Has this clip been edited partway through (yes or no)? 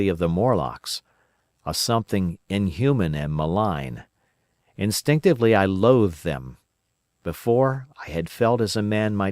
yes